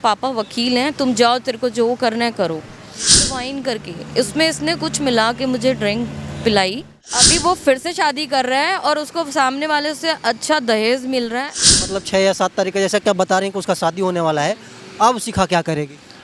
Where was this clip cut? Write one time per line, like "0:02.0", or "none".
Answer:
0:03.2
0:07.3
0:11.6